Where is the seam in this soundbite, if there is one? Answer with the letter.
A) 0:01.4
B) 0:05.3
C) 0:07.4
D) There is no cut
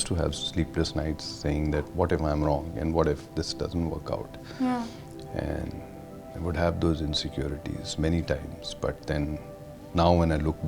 D